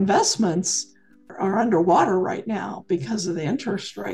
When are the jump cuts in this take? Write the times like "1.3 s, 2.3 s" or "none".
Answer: 1.3 s